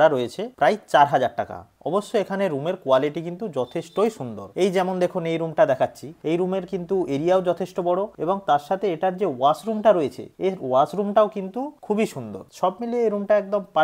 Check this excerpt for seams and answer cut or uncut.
uncut